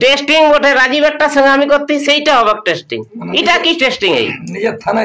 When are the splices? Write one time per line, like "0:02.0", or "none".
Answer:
none